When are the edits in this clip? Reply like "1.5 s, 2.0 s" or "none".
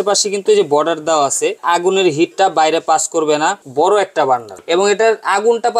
1.6 s, 3.6 s, 4.5 s